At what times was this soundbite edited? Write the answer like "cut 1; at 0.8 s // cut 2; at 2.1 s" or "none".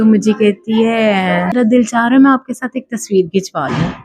cut 1; at 1.6 s